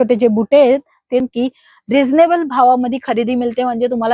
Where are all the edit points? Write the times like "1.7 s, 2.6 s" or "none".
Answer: 1.2 s